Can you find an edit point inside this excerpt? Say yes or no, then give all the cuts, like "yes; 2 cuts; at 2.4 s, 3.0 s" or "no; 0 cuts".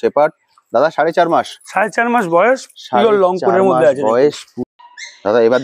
yes; 1 cut; at 4.5 s